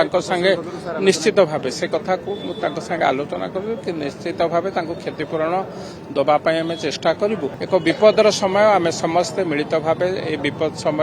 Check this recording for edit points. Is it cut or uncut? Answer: cut